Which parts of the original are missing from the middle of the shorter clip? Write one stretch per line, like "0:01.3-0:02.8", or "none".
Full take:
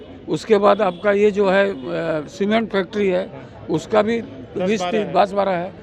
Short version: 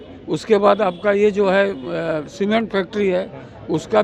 none